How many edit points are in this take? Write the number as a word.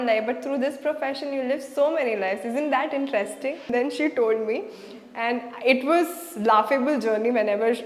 one